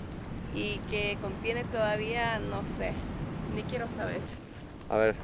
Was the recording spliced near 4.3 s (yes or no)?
yes